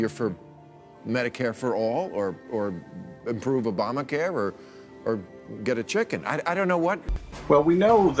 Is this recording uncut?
no; 1 cut; at 7.1 s

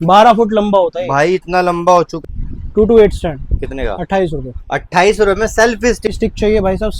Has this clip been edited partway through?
yes; 2 cuts; at 2.2 s, 6.1 s

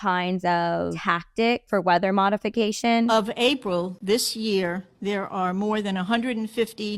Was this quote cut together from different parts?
yes; 2 cuts; at 1.6 s, 3.1 s

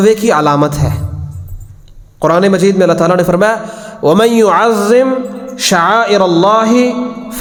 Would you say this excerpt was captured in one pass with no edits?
yes; 0 cuts

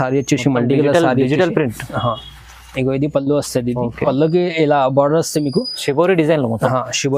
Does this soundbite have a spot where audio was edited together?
yes; 1 cut; at 4.0 s

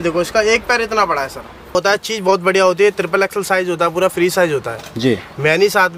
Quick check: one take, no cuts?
no; 1 cut; at 1.7 s

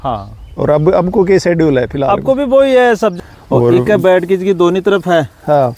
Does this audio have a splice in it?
yes; 1 cut; at 3.1 s

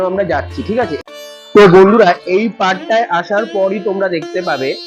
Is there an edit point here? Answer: yes; 1 cut; at 1.0 s

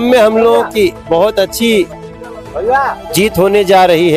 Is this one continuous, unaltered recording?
yes; 0 cuts

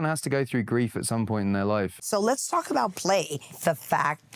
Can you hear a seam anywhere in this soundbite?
yes; 2 cuts; at 2.0 s, 3.5 s

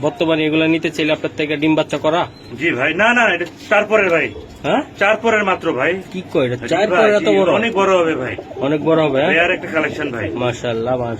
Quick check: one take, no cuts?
yes; 0 cuts

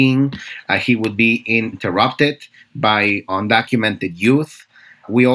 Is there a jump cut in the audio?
yes; 2 cuts; at 1.8 s, 3.3 s

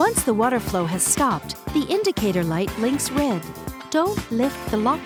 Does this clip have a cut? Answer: no; 0 cuts

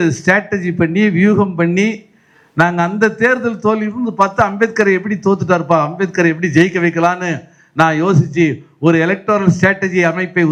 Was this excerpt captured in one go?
yes; 0 cuts

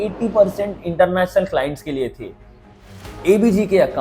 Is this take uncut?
no; 1 cut; at 2.6 s

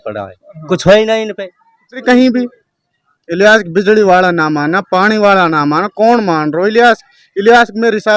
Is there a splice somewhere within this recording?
yes; 1 cut; at 2.0 s

